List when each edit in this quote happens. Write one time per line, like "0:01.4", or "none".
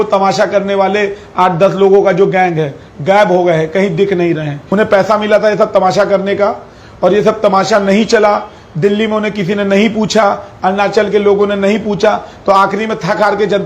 0:04.6